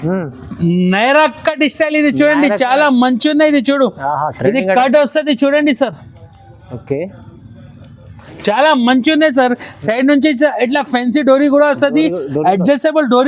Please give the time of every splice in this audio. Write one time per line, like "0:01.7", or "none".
none